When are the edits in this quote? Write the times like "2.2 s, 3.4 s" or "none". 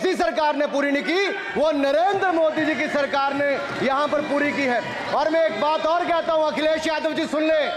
none